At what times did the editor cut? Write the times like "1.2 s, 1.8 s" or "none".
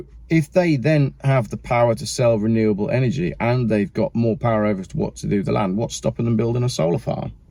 none